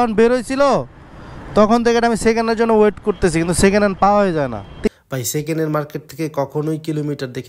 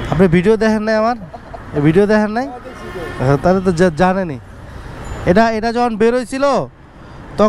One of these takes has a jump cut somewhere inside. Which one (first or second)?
first